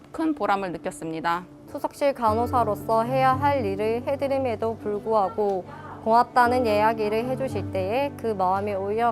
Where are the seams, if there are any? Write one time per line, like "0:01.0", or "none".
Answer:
0:01.5